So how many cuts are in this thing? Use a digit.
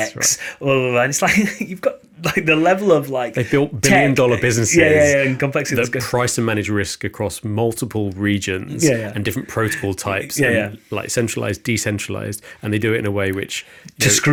0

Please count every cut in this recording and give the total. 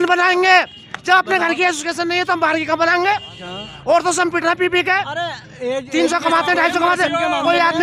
0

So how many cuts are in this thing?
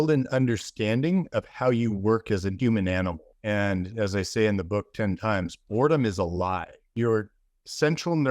3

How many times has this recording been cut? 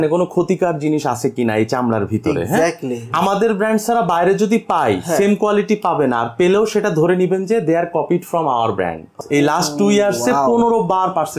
2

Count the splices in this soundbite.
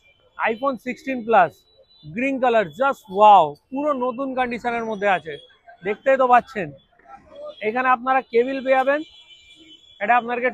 0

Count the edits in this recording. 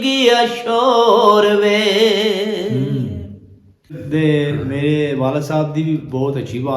1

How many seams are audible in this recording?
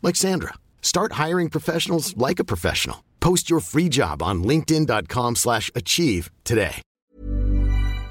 1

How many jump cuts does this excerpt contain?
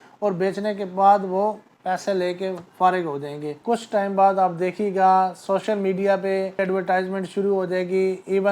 2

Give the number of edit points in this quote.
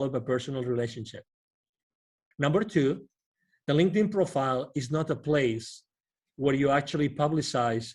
1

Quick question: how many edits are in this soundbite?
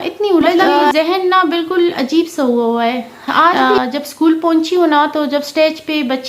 2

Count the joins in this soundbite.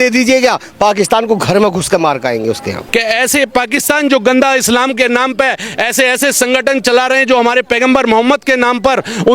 1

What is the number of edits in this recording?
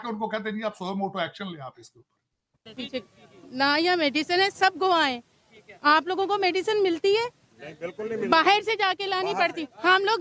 1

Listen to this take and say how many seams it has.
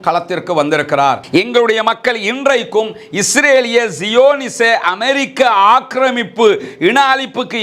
1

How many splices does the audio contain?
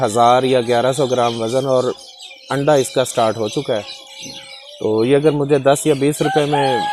0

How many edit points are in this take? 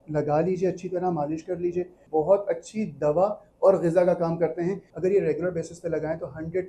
2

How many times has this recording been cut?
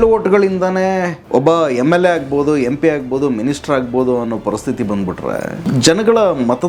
2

